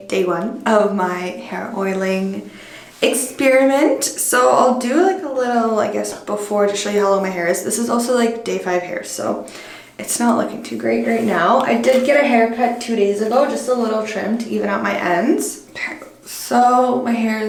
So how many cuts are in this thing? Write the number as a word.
zero